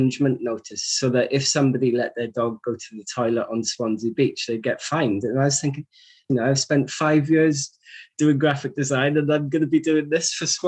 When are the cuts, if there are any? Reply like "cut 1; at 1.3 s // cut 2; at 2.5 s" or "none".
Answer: cut 1; at 6.2 s